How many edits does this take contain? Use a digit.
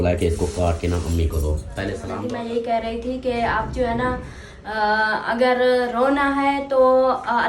1